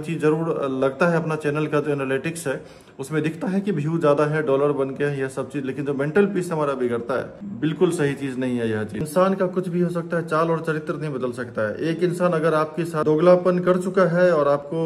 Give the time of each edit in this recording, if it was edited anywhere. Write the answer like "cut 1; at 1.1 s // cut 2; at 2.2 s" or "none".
cut 1; at 7.4 s // cut 2; at 9.1 s // cut 3; at 13.0 s